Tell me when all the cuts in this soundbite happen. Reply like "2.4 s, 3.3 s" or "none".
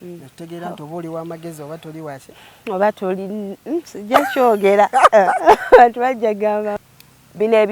6.8 s